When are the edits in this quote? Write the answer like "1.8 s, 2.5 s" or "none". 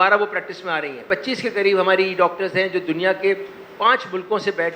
none